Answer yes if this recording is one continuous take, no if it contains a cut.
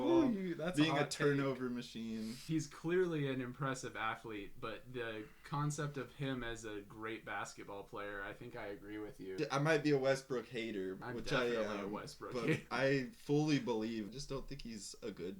no